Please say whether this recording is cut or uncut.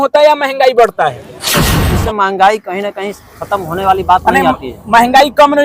cut